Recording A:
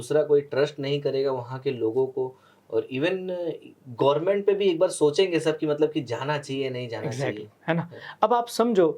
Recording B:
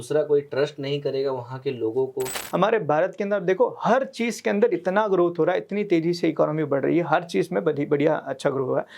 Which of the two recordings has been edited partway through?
B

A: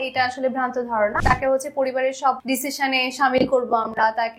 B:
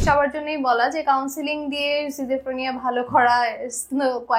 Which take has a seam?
A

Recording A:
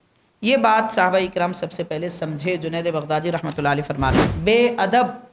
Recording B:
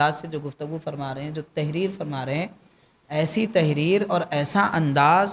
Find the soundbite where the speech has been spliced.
A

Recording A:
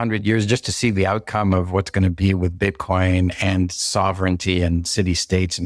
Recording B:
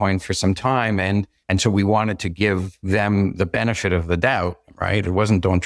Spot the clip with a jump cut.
B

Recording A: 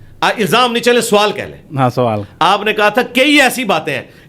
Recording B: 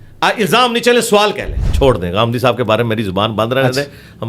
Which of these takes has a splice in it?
B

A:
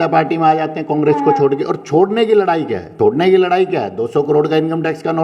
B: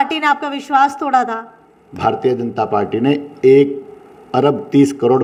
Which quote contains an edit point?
A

